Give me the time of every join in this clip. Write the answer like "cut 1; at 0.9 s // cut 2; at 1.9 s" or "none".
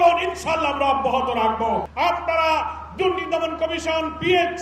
cut 1; at 1.9 s